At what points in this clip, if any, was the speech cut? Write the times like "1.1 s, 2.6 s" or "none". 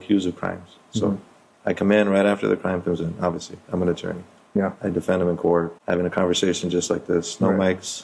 5.8 s